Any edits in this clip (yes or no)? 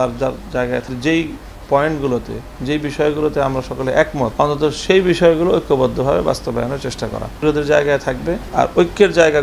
yes